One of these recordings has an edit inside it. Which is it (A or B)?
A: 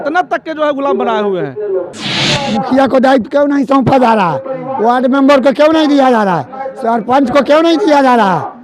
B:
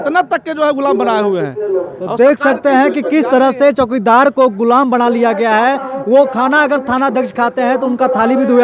A